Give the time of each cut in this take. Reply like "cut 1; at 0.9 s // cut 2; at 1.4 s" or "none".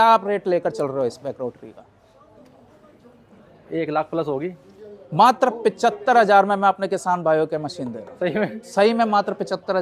none